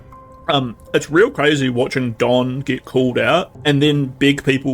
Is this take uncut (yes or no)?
no